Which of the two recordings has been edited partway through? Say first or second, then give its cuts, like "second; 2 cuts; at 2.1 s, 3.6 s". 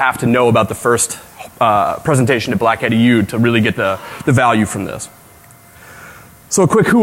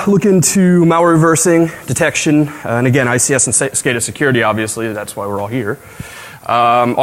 first; 1 cut; at 3.5 s